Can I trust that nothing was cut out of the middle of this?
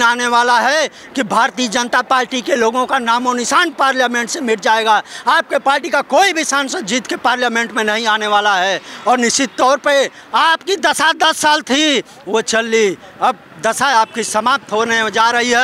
yes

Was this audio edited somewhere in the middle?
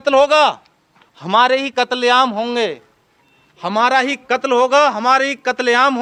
no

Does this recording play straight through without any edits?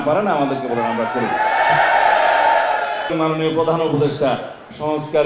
no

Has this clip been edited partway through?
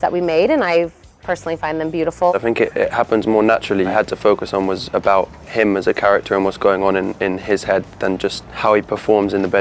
yes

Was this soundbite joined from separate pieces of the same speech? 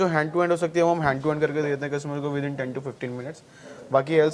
no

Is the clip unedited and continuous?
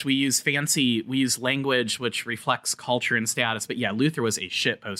yes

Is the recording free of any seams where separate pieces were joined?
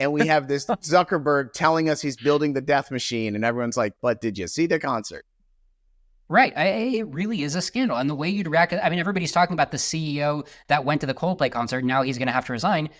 yes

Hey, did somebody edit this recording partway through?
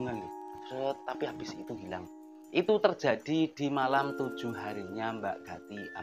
no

